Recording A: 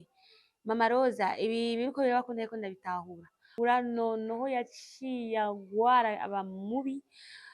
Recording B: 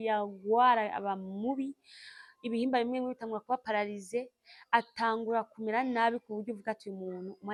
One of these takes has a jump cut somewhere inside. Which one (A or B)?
A